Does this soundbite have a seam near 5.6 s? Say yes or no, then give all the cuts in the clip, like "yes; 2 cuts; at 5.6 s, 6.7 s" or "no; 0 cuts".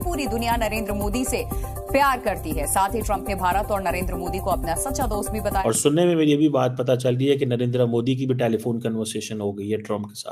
yes; 1 cut; at 5.6 s